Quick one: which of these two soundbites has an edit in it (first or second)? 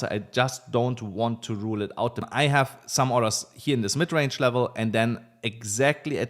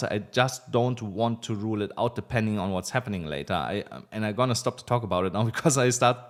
first